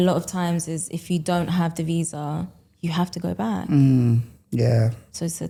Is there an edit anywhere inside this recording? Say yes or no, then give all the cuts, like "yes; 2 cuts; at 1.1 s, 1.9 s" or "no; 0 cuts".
no; 0 cuts